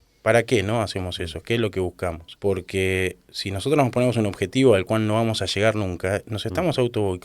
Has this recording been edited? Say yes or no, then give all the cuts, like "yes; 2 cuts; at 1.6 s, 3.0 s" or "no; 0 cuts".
yes; 1 cut; at 2.3 s